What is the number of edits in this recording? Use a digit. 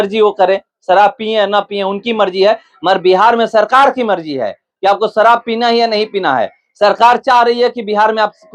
0